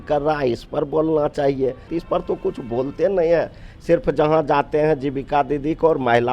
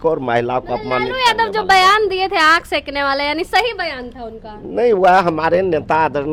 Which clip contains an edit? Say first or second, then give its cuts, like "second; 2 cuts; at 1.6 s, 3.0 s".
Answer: first; 1 cut; at 2.0 s